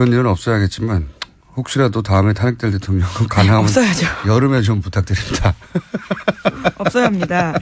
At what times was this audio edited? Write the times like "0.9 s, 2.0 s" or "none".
4.3 s